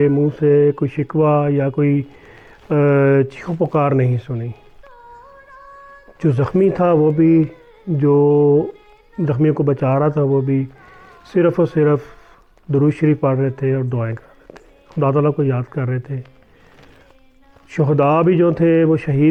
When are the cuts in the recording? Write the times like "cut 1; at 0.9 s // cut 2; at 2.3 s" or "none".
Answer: none